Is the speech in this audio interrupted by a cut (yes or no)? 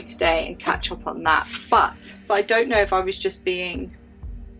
yes